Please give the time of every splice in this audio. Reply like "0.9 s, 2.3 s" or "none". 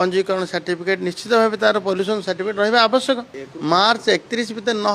3.3 s